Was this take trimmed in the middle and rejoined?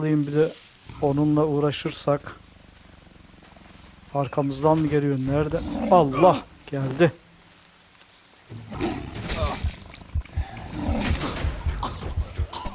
yes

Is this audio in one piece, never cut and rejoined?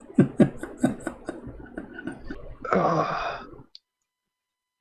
no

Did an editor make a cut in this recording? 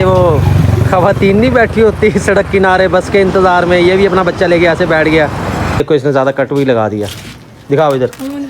yes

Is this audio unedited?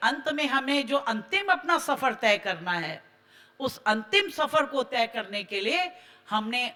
yes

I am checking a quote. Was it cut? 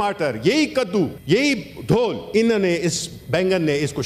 yes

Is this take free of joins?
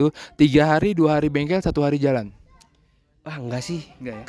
yes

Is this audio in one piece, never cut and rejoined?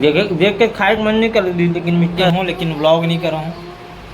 no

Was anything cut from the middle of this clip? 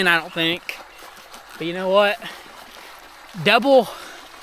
no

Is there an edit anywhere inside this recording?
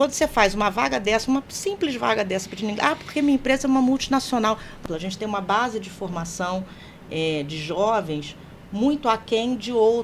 yes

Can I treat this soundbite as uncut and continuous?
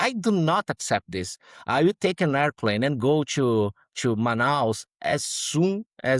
yes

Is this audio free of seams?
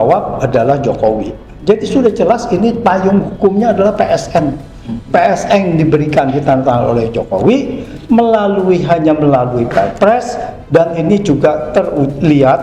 yes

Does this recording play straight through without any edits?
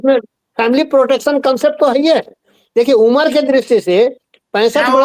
yes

